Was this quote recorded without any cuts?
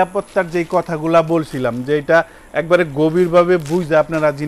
yes; 0 cuts

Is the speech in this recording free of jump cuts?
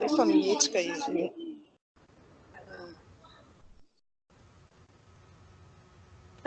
yes; 0 cuts

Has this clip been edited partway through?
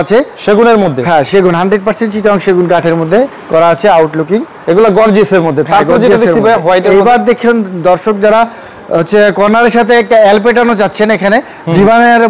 no; 0 cuts

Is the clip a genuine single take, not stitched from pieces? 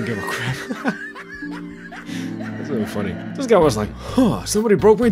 yes; 0 cuts

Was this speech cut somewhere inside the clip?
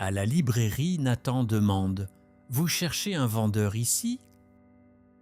yes; 1 cut; at 4.3 s

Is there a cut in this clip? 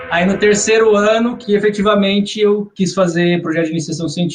yes; 2 cuts; at 1.4 s, 2.7 s

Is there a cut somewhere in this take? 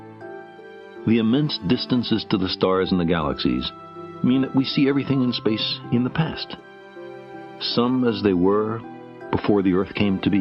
no; 0 cuts

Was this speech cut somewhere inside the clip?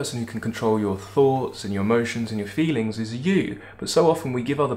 no; 0 cuts

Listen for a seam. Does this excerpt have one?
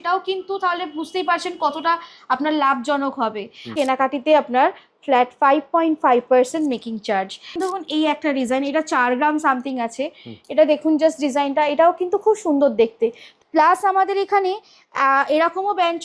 yes; 3 cuts; at 3.7 s, 7.5 s, 13.3 s

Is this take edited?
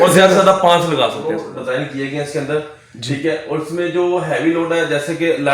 yes; 1 cut; at 1.2 s

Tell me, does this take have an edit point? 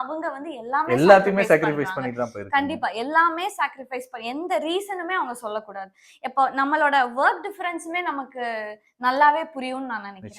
no; 0 cuts

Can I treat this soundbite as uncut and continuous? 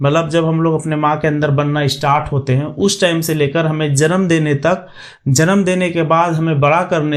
yes; 0 cuts

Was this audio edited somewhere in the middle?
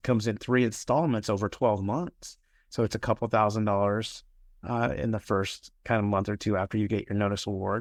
no; 0 cuts

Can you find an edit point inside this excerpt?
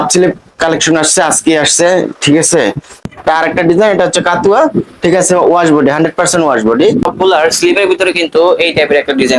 yes; 2 cuts; at 3.1 s, 7.1 s

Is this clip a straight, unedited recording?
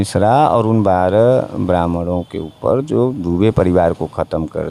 yes; 0 cuts

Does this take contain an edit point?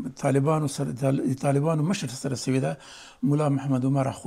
no; 0 cuts

